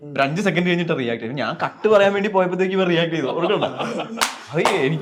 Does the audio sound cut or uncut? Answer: uncut